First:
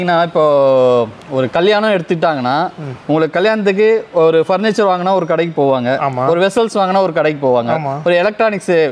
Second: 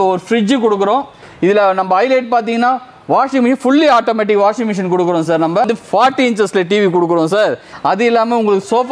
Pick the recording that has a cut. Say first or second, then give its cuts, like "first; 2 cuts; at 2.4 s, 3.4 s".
second; 3 cuts; at 1.2 s, 5.6 s, 7.7 s